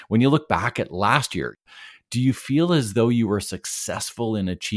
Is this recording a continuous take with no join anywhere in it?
no; 1 cut; at 1.6 s

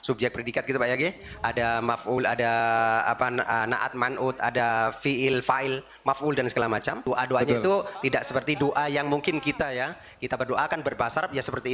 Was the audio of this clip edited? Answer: yes; 2 cuts; at 7.0 s, 8.0 s

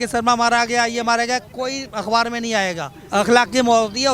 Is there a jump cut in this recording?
yes; 1 cut; at 3.0 s

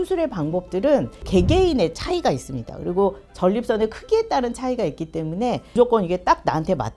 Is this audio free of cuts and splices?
no; 2 cuts; at 1.2 s, 5.7 s

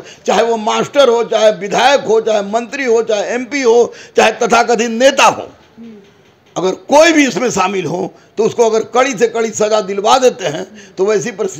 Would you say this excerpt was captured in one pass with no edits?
yes; 0 cuts

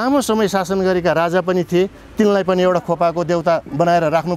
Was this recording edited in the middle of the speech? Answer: no; 0 cuts

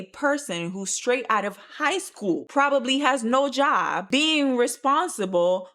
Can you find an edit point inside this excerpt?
yes; 1 cut; at 4.0 s

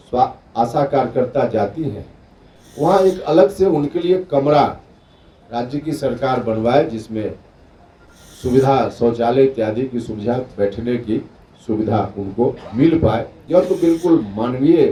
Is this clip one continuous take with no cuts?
yes; 0 cuts

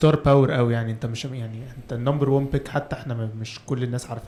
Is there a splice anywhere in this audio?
no; 0 cuts

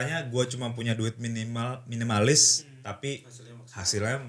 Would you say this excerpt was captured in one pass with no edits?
yes; 0 cuts

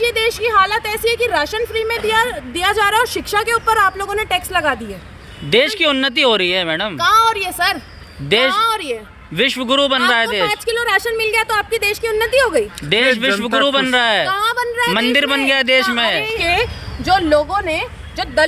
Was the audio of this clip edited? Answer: yes; 1 cut; at 16.4 s

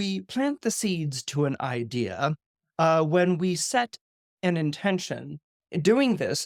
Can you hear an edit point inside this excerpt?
no; 0 cuts

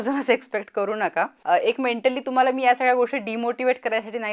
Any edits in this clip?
yes; 1 cut; at 1.4 s

